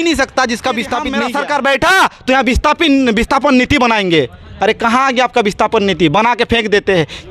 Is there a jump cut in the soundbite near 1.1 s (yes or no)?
yes